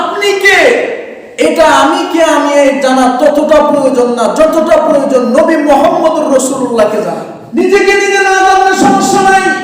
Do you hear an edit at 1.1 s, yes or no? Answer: no